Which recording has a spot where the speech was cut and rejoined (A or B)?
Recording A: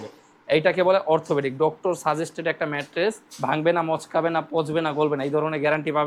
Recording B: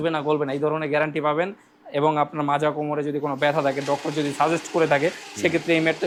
A